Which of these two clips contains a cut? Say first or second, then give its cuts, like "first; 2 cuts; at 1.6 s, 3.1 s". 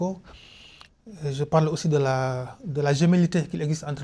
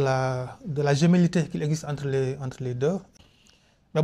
second; 1 cut; at 3.1 s